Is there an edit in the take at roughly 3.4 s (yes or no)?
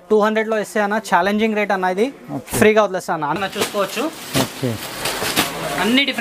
yes